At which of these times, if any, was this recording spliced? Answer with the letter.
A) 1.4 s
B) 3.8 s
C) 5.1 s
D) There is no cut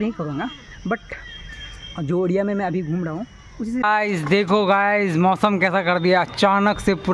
B